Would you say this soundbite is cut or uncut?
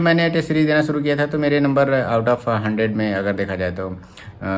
uncut